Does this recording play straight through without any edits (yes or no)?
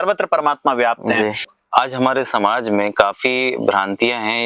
no